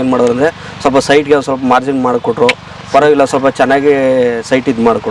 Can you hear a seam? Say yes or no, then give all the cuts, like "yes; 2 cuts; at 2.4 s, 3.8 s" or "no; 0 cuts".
no; 0 cuts